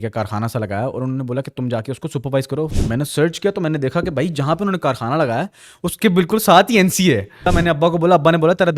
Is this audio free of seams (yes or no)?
no